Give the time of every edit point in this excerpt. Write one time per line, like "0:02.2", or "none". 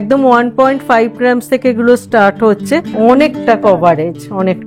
0:02.9